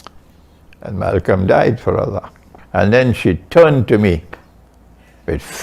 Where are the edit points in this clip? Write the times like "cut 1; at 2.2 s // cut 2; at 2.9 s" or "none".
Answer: cut 1; at 2.5 s